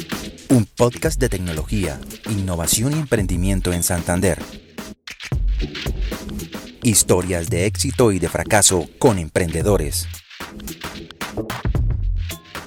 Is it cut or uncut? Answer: uncut